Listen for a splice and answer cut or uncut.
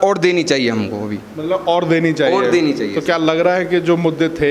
uncut